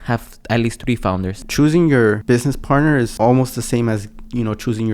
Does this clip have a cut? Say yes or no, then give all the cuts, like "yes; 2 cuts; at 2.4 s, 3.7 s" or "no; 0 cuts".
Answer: yes; 3 cuts; at 1.3 s, 2.2 s, 3.1 s